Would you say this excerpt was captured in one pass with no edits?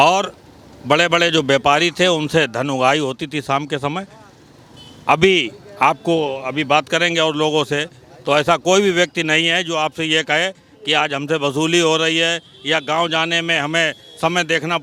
yes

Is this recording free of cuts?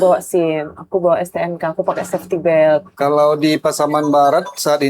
no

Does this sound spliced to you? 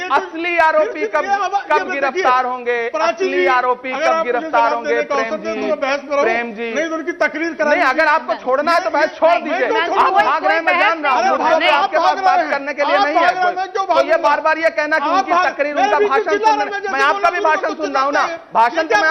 no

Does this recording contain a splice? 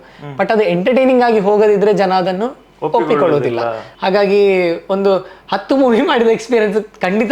yes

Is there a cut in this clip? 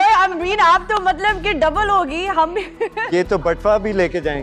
no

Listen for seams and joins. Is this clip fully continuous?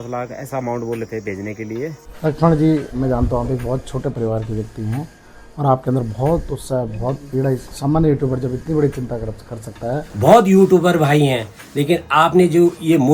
no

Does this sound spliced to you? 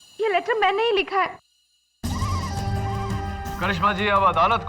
yes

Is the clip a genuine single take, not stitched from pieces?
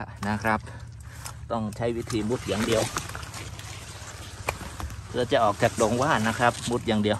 yes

